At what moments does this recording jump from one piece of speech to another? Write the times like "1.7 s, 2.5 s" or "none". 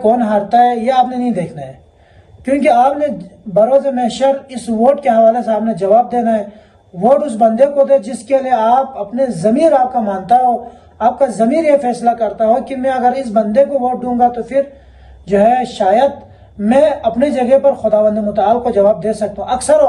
none